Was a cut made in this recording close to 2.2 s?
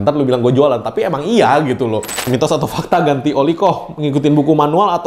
yes; 1 cut; at 2.2 s

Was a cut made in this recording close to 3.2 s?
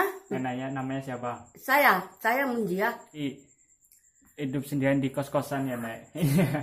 yes; 1 cut; at 3.2 s

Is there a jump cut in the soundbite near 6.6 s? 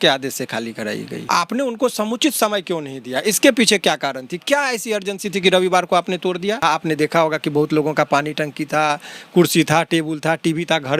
yes; 2 cuts; at 1.2 s, 6.6 s

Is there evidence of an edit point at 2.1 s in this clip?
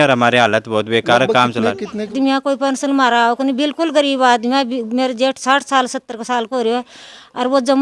yes; 1 cut; at 2.1 s

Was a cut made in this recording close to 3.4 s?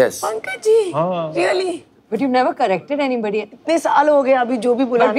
yes; 2 cuts; at 1.9 s, 3.4 s

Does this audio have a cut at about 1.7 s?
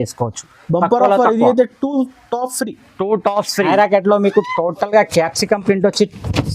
no; 1 cut; at 3.7 s

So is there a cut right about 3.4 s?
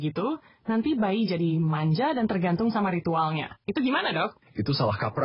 no; 0 cuts

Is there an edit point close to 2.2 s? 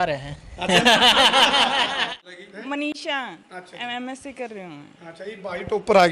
yes; 1 cut; at 2.2 s

